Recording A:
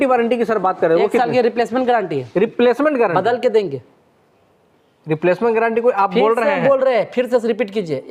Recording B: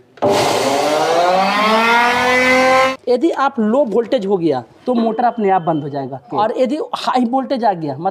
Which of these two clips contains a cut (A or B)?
B